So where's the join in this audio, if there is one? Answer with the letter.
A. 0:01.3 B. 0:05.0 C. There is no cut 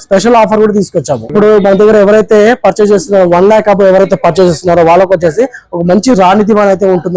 A